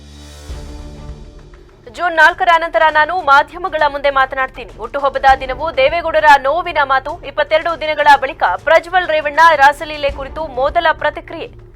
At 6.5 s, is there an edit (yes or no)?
no